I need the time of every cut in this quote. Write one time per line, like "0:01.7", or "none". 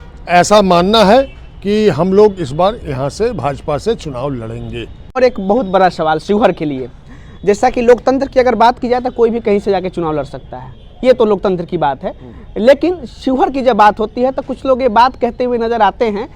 0:05.2

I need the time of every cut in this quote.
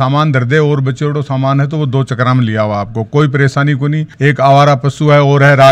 none

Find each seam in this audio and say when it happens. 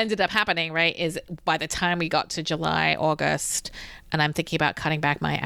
none

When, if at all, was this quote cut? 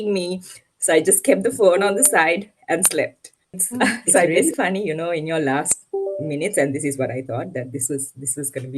0:04.4

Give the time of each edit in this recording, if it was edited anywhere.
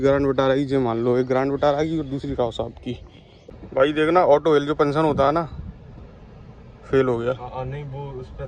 0:03.6

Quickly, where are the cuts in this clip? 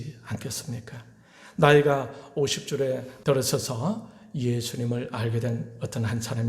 0:03.1

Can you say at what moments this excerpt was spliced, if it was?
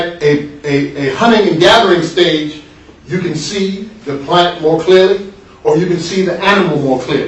0:04.8

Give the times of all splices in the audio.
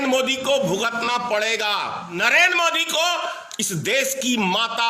0:02.2

